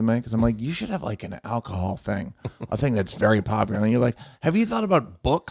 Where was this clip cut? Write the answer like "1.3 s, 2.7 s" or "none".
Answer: none